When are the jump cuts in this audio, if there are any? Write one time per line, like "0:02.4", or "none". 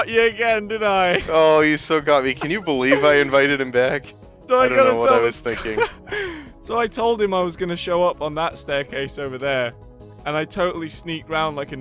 0:05.7